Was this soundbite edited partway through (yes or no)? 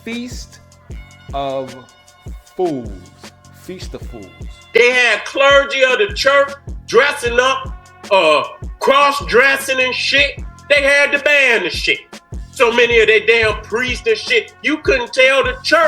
yes